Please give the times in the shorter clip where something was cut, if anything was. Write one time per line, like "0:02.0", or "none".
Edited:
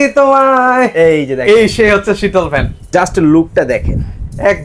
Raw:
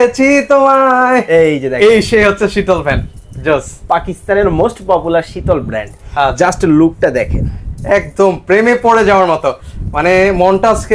0:02.9